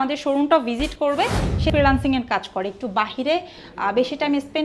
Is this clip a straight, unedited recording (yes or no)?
no